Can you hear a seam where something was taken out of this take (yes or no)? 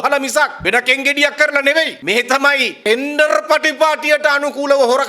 yes